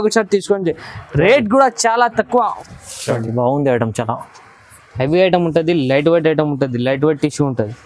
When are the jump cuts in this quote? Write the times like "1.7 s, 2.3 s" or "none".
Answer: 2.5 s